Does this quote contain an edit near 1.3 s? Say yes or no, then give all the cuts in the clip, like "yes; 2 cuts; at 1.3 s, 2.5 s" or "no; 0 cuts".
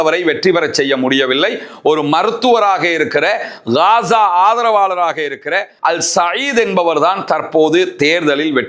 no; 1 cut; at 5.7 s